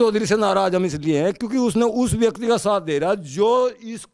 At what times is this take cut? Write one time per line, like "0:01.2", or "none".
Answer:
none